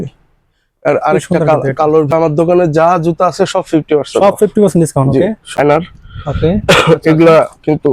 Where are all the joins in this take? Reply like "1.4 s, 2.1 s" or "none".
2.1 s, 5.6 s